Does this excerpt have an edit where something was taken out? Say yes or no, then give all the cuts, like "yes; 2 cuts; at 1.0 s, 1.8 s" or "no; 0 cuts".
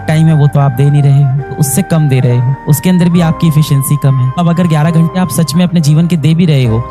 yes; 2 cuts; at 1.5 s, 4.4 s